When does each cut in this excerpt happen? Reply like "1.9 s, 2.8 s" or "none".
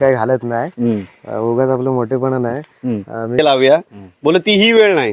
3.4 s